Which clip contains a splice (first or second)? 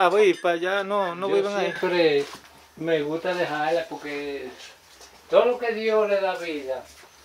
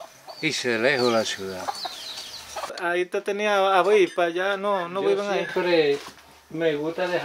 second